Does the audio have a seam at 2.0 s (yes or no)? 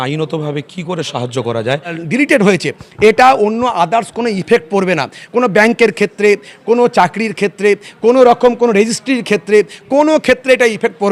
yes